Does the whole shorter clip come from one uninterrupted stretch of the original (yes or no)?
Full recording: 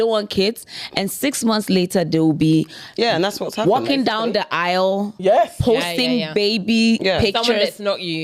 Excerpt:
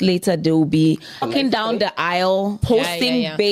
no